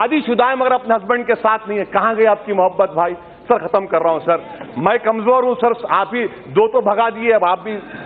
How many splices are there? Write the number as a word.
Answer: zero